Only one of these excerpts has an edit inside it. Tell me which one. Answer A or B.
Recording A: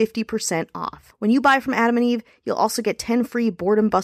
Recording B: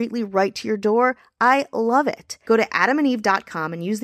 B